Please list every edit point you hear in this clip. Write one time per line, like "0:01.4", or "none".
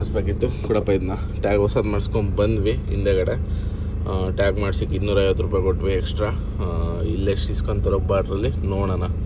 none